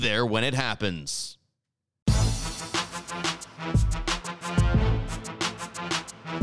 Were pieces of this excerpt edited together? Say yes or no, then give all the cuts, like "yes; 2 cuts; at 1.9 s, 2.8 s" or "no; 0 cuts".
yes; 1 cut; at 2.0 s